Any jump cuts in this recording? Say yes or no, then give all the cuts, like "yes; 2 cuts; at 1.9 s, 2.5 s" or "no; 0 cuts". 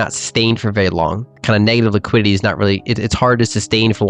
yes; 1 cut; at 1.3 s